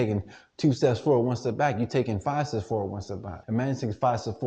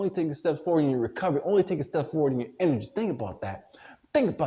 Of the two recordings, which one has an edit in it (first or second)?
first